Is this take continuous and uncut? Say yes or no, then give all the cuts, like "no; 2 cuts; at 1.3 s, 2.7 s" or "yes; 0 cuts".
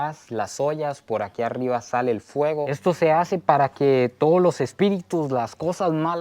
no; 1 cut; at 2.7 s